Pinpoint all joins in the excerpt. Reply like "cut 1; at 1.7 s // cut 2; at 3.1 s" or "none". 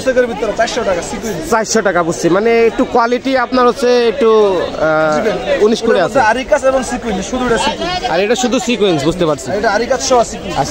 none